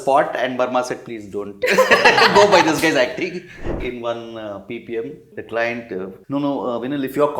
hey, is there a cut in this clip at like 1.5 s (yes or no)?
no